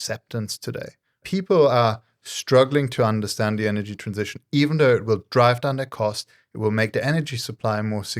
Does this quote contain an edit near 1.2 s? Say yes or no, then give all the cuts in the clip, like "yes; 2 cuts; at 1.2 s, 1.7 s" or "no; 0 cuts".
yes; 1 cut; at 1.2 s